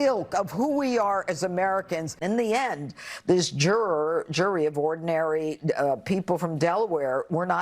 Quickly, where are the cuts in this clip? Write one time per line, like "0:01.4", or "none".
0:02.1